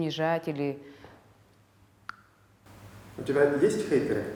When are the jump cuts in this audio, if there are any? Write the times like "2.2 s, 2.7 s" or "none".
none